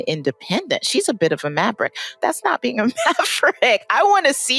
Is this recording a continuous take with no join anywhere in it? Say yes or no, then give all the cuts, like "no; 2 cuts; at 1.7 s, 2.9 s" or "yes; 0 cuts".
no; 1 cut; at 2.1 s